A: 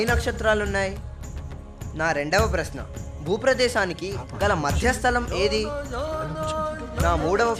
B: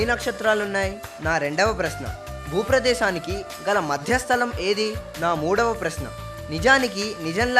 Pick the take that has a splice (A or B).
B